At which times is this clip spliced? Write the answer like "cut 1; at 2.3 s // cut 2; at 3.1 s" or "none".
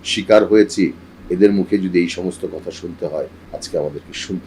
cut 1; at 3.4 s

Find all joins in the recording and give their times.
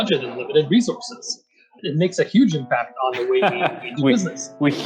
cut 1; at 1.8 s

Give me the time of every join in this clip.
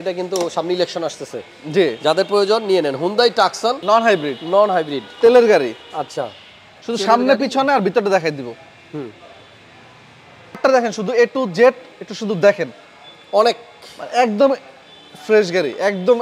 cut 1; at 3.8 s // cut 2; at 10.6 s

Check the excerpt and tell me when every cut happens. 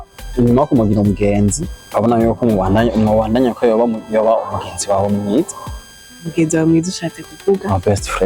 cut 1; at 1.7 s

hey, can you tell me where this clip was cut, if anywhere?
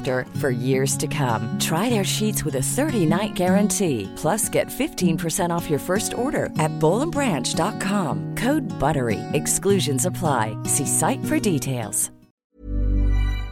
cut 1; at 12.5 s

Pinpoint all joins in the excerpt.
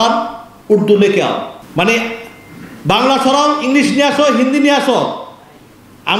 cut 1; at 1.6 s

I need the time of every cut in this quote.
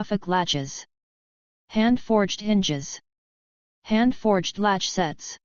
cut 1; at 4.4 s

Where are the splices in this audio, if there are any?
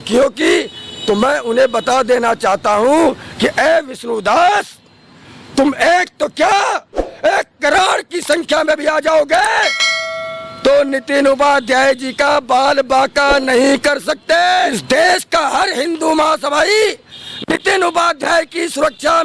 cut 1; at 14.8 s

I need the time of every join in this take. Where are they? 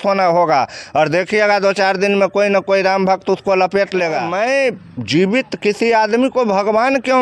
cut 1; at 4.3 s

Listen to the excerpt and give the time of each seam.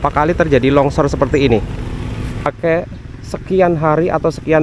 cut 1; at 2.5 s

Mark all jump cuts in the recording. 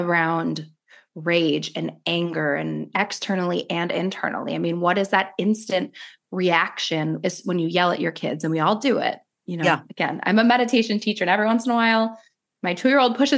cut 1; at 2.9 s

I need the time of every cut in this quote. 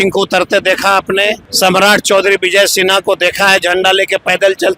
cut 1; at 1.5 s

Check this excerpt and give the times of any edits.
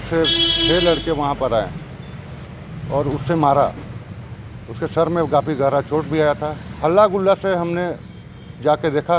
none

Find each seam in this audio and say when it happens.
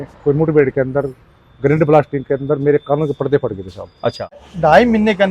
cut 1; at 4.4 s

